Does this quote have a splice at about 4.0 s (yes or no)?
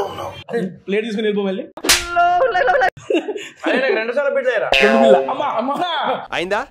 no